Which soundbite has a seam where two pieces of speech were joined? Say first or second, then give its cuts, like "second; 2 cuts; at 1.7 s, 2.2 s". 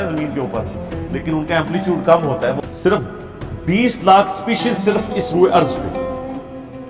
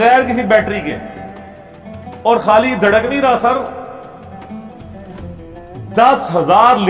first; 1 cut; at 2.6 s